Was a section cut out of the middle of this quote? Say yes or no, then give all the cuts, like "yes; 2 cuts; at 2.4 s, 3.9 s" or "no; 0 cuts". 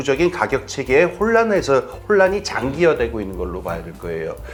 no; 0 cuts